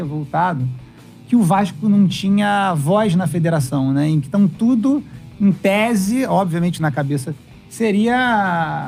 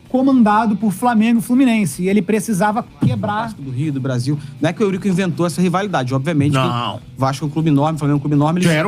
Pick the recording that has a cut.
second; 1 cut; at 3.6 s

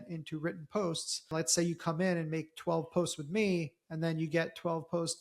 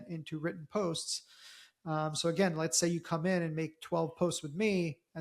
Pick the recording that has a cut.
first; 1 cut; at 1.3 s

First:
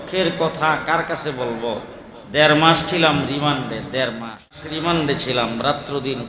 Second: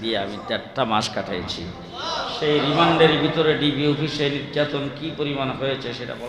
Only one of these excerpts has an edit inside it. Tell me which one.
first; 1 cut; at 4.7 s

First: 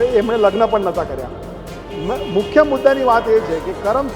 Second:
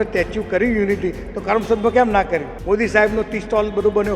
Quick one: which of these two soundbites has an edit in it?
second; 1 cut; at 2.5 s

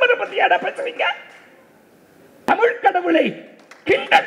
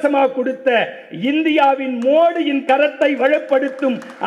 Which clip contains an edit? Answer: first; 1 cut; at 2.3 s

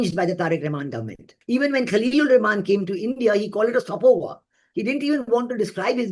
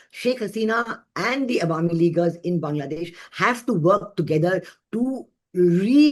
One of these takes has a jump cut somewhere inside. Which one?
first; 1 cut; at 1.3 s

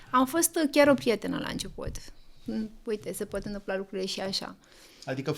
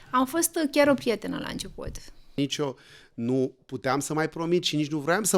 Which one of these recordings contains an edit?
second; 1 cut; at 2.4 s

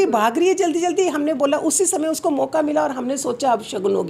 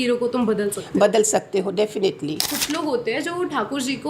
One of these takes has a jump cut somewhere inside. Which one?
second; 1 cut; at 2.5 s

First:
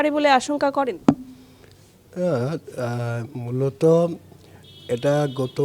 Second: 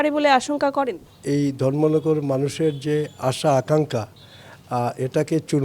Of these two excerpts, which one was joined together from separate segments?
second; 1 cut; at 1.0 s

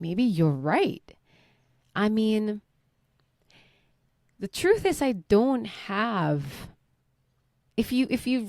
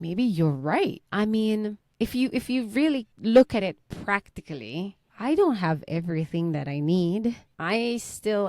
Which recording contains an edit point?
second; 5 cuts; at 1.0 s, 1.8 s, 3.1 s, 5.0 s, 7.5 s

